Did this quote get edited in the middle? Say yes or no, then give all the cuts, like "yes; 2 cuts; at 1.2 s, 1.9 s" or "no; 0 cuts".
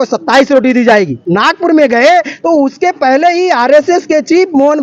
yes; 1 cut; at 1.3 s